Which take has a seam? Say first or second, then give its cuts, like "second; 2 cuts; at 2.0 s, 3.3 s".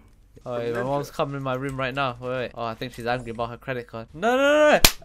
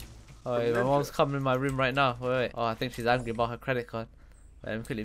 first; 1 cut; at 4.0 s